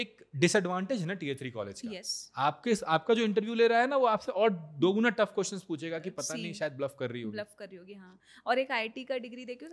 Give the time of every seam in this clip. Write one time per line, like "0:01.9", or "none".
none